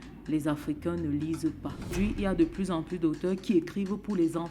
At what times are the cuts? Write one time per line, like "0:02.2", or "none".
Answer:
0:01.9